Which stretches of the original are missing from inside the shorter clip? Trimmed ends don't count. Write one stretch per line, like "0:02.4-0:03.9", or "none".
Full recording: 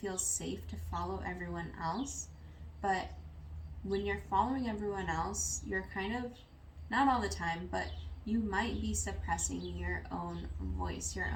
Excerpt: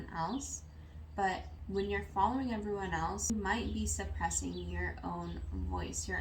0:03.2-0:03.7
0:05.5-0:08.4